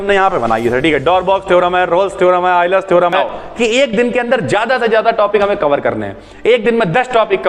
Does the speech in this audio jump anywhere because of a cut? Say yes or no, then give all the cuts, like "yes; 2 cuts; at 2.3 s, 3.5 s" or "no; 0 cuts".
yes; 1 cut; at 3.2 s